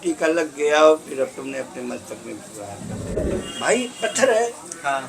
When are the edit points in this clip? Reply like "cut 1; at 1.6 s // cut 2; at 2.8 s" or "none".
cut 1; at 3.2 s

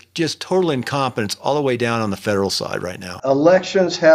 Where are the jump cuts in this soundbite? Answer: cut 1; at 3.1 s

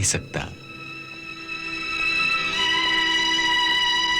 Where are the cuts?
none

